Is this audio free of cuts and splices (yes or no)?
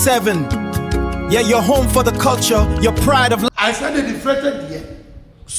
no